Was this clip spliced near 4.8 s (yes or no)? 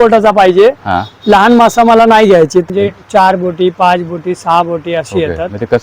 no